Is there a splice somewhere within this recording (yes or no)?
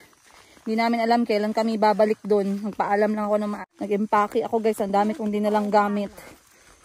yes